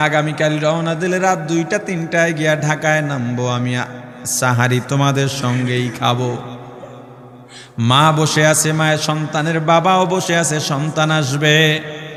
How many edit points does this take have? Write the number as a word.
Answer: zero